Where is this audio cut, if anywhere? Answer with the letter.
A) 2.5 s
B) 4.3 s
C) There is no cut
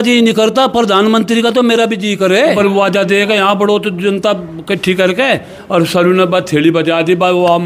A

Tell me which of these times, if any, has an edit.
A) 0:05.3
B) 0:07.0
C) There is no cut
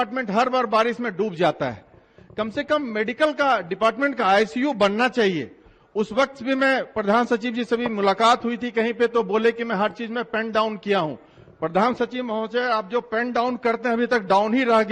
C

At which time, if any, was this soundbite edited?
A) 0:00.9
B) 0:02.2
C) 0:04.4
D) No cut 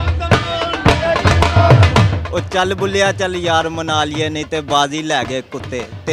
B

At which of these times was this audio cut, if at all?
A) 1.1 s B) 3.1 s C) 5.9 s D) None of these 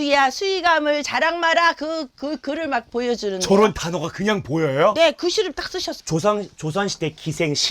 C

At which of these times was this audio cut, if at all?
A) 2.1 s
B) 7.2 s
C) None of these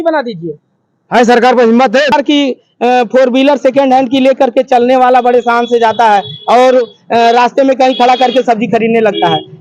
A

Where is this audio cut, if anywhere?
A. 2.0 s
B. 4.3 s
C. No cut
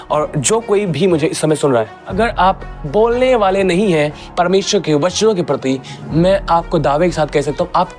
A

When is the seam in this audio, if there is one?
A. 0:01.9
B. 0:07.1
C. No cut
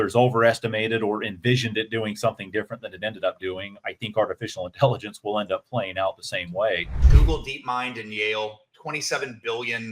B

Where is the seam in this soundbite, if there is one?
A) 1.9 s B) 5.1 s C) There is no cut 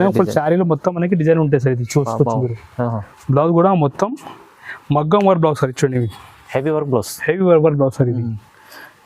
C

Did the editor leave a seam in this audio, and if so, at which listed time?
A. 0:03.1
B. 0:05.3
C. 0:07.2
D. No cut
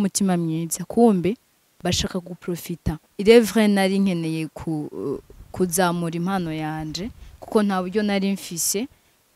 A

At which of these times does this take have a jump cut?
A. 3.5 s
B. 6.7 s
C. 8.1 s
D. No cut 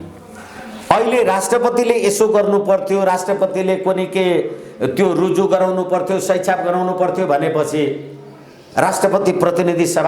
D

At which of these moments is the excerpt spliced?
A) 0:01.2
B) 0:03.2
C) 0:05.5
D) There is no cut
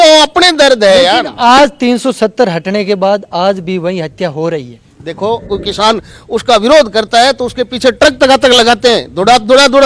C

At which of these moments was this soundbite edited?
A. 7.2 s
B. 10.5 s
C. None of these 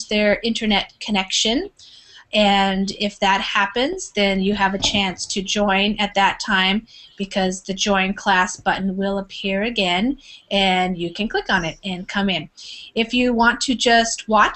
B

